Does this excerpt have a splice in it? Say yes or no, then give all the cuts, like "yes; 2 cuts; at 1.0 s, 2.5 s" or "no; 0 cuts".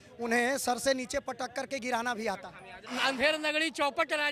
yes; 1 cut; at 2.8 s